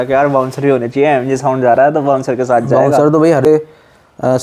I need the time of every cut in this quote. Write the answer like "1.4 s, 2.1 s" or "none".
3.4 s